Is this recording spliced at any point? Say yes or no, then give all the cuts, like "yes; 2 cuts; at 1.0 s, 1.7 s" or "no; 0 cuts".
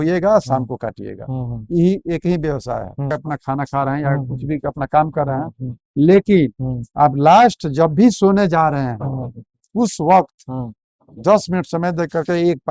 yes; 1 cut; at 3.1 s